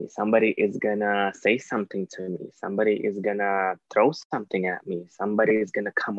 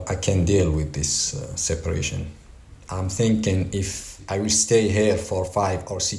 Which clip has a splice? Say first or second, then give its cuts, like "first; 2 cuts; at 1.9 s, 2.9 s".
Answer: second; 2 cuts; at 2.8 s, 4.1 s